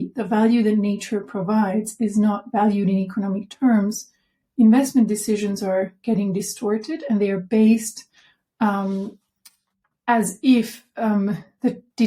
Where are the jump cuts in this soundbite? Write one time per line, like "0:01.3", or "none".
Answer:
none